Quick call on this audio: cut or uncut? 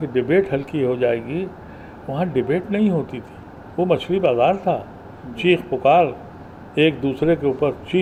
uncut